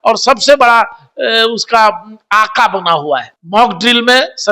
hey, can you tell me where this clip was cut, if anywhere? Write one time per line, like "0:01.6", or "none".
0:03.3